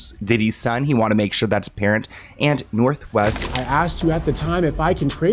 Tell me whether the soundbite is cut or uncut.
cut